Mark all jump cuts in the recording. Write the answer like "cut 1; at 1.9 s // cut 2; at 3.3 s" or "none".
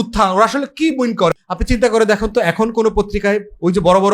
cut 1; at 1.3 s